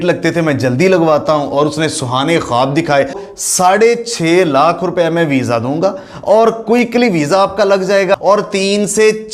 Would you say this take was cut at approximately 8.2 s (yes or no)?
yes